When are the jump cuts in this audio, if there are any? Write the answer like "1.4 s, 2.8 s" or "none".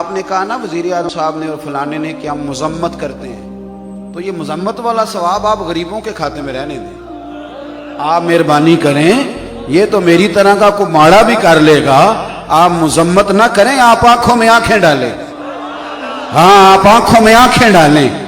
1.1 s